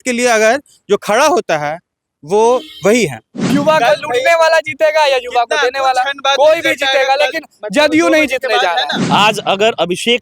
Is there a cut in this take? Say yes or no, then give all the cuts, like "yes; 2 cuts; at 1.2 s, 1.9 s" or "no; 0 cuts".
yes; 2 cuts; at 3.5 s, 8.9 s